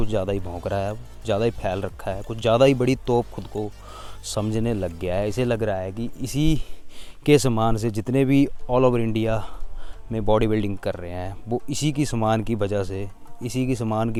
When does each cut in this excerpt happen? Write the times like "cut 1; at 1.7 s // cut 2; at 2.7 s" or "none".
none